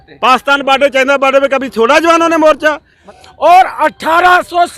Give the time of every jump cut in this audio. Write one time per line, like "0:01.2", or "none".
0:03.0